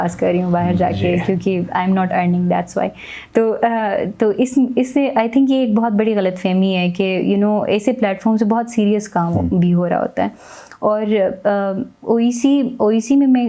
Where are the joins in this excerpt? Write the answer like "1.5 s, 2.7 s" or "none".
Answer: none